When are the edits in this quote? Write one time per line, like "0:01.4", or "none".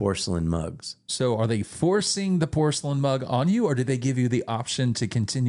none